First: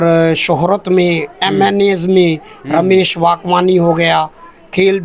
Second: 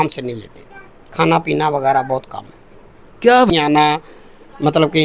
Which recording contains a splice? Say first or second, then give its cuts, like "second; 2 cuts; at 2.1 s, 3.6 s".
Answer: second; 1 cut; at 3.5 s